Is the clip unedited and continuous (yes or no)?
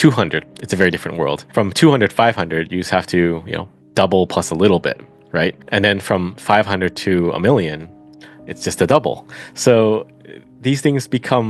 no